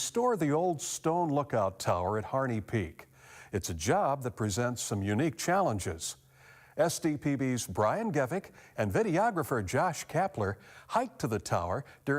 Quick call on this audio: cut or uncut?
cut